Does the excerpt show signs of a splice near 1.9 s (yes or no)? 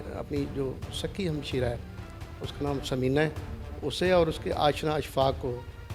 no